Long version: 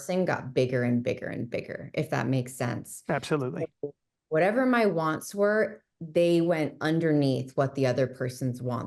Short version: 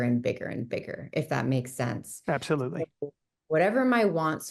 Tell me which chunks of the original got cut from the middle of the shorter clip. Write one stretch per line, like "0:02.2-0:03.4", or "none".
none